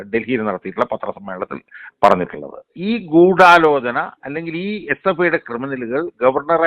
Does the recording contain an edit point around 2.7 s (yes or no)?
yes